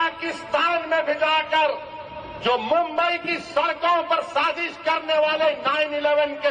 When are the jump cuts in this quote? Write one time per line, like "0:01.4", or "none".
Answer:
none